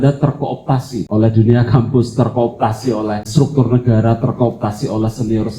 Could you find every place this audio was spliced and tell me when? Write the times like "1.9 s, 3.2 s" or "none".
1.0 s, 3.3 s